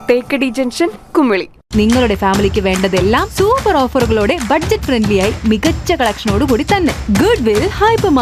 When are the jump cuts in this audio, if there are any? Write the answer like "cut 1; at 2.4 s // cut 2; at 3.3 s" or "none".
none